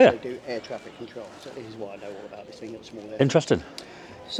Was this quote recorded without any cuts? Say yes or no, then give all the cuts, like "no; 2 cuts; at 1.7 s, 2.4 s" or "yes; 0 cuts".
yes; 0 cuts